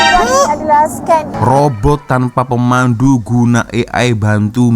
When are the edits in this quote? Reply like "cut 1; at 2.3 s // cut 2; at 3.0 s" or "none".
cut 1; at 1.3 s

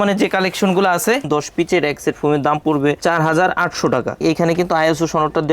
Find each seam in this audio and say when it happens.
cut 1; at 1.2 s // cut 2; at 3.0 s // cut 3; at 4.2 s

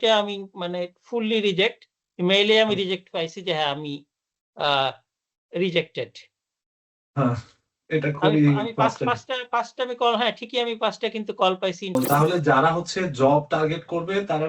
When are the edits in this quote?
cut 1; at 12.0 s

